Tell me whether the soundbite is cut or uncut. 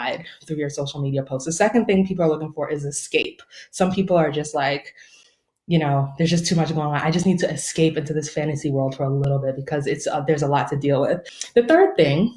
cut